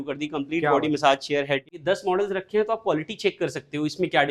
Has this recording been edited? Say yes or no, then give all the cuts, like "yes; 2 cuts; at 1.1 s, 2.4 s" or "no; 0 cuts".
yes; 1 cut; at 1.7 s